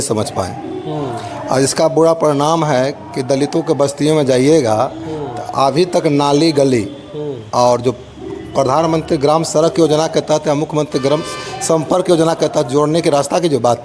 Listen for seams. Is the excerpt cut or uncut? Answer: uncut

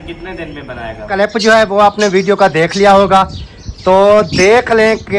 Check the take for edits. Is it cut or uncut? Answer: cut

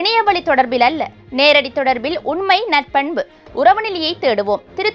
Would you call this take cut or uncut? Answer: uncut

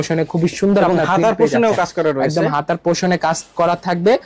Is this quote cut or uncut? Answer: uncut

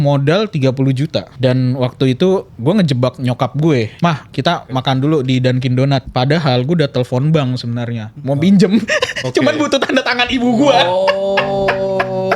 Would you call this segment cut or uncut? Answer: cut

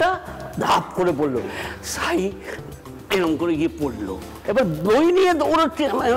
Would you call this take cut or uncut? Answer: cut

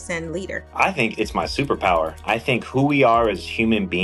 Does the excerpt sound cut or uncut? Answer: cut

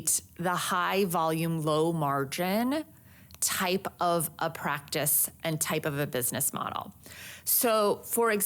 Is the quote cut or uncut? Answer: uncut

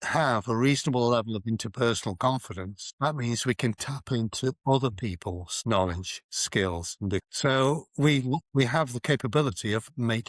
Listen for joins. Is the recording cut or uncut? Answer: uncut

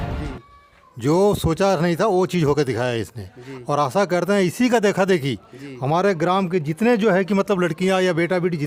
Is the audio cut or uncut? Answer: uncut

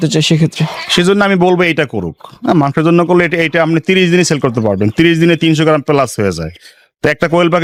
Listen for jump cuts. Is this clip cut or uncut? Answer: uncut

